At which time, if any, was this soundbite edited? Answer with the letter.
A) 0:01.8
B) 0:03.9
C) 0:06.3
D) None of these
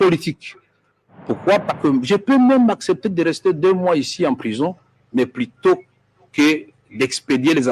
A